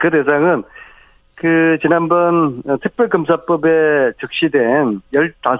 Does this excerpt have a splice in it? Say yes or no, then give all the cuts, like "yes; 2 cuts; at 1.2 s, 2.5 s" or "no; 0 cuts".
yes; 1 cut; at 1.8 s